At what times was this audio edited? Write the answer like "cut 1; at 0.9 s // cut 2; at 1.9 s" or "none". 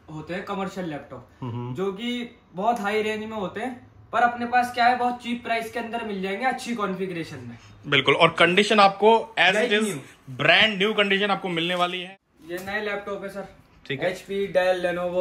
cut 1; at 12.0 s